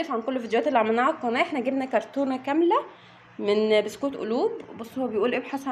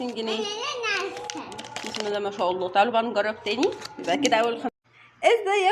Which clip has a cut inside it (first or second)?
second